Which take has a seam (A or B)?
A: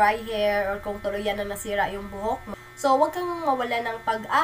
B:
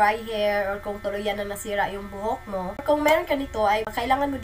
A